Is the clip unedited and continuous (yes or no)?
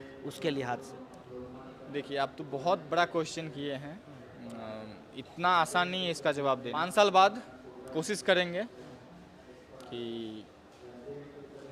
no